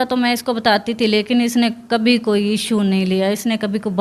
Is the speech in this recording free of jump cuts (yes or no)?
yes